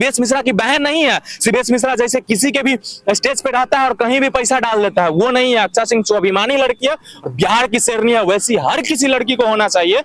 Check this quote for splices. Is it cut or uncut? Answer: uncut